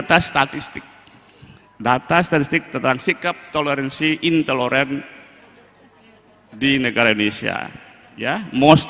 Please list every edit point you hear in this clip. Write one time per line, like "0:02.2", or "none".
none